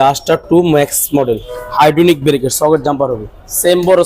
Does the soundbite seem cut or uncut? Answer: cut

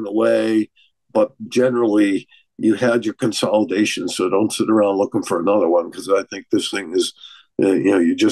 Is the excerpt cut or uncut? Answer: uncut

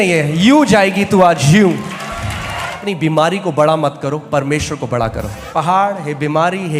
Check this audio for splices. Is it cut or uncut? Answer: cut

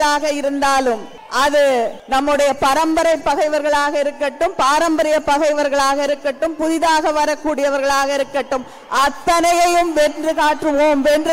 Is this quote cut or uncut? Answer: cut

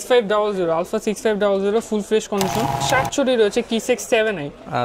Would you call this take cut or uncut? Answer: cut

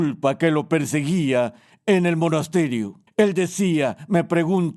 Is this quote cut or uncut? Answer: cut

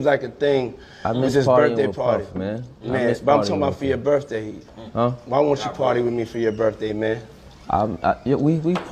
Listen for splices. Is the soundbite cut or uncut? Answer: uncut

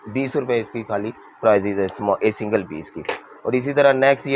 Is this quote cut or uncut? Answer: uncut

